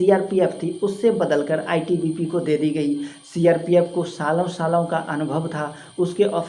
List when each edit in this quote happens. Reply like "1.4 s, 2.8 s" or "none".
none